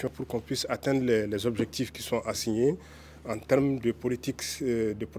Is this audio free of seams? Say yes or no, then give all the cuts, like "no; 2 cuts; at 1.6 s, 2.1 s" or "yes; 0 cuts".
yes; 0 cuts